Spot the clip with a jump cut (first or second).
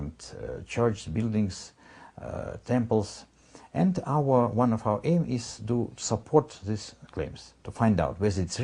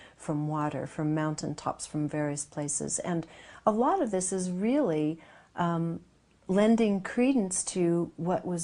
second